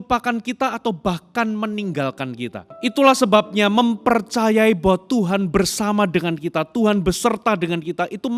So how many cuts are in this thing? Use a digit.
1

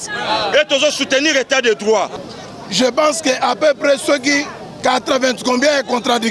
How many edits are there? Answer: 1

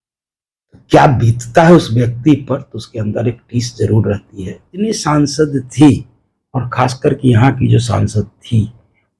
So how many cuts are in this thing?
1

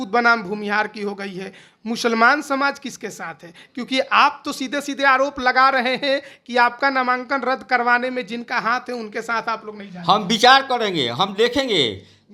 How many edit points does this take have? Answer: 0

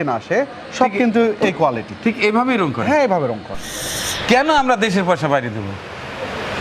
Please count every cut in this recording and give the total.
1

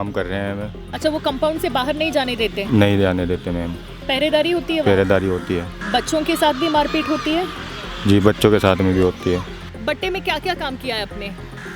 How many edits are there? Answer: 2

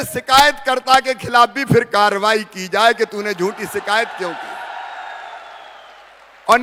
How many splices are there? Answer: 0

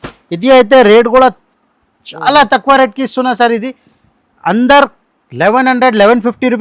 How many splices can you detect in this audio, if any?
0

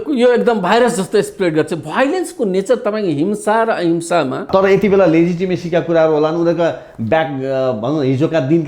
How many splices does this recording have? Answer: 1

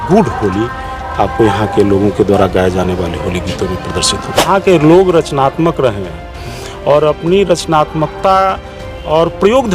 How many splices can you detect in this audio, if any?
1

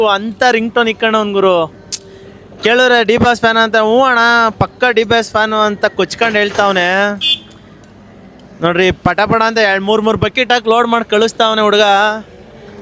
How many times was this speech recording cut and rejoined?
0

